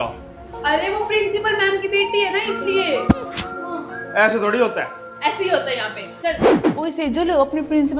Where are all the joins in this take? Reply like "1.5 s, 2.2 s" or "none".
none